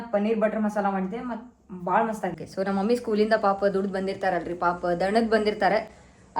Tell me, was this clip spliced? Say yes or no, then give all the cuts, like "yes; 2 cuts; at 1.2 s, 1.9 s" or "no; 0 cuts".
yes; 1 cut; at 2.4 s